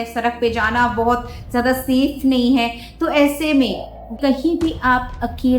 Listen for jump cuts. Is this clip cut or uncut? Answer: cut